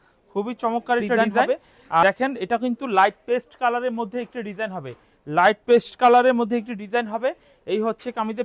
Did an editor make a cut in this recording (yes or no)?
yes